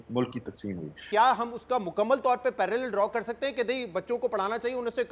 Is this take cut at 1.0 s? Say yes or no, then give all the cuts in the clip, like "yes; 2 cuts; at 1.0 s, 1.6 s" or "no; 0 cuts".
yes; 1 cut; at 1.0 s